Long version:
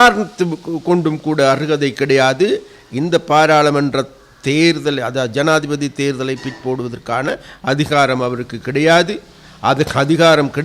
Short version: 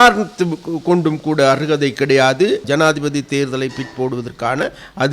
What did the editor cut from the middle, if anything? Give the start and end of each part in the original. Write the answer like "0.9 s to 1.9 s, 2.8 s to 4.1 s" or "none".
2.6 s to 5.3 s